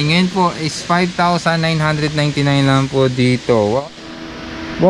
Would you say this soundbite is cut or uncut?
cut